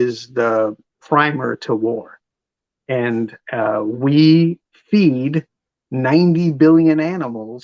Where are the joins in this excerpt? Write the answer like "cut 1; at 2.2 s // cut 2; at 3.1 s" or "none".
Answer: none